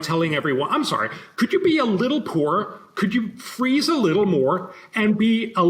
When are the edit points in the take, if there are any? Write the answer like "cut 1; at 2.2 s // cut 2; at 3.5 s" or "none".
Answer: none